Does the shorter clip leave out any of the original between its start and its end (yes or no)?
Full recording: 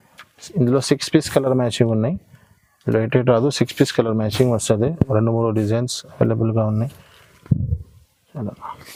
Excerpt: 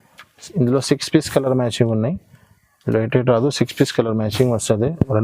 no